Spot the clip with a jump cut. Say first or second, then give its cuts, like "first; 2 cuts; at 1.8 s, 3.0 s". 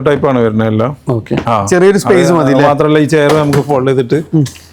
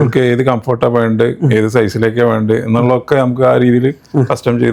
first; 1 cut; at 1.4 s